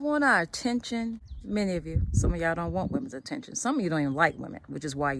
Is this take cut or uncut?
cut